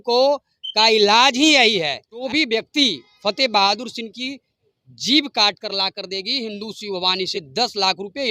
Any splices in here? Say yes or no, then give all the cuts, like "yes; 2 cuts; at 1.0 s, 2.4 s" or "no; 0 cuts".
yes; 2 cuts; at 2.2 s, 7.3 s